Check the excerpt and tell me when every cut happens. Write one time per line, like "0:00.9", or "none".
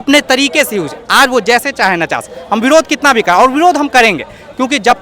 none